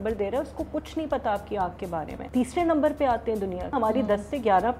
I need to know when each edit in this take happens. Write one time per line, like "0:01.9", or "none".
0:02.2
0:03.7